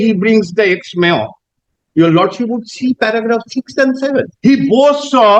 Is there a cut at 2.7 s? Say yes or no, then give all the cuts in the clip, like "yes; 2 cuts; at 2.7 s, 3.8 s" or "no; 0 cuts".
no; 1 cut; at 4.3 s